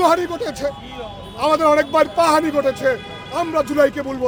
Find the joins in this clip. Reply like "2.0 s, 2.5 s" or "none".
none

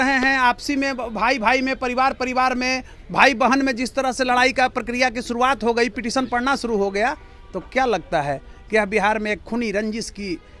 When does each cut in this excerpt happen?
none

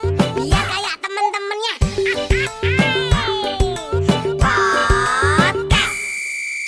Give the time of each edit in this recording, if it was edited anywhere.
none

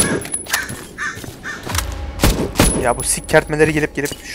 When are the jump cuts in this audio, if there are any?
none

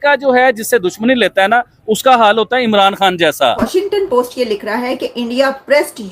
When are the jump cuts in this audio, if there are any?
3.6 s

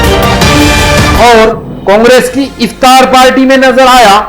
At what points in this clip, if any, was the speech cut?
1.0 s

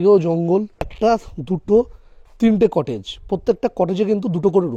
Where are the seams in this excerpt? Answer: 0.9 s

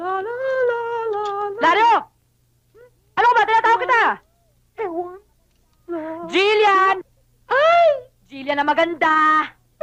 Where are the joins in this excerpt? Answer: none

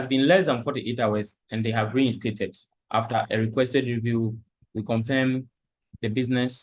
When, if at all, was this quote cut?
2.7 s

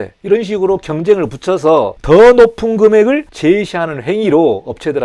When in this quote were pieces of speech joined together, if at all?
2.0 s, 3.3 s

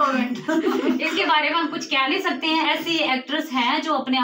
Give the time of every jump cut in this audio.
none

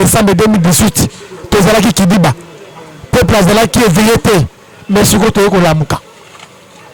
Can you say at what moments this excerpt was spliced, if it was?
none

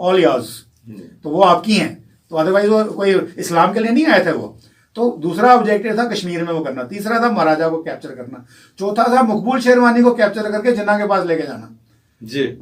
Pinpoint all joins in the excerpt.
none

